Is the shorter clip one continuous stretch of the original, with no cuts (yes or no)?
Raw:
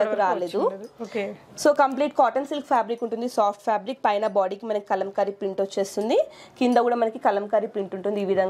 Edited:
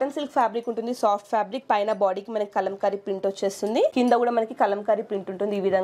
no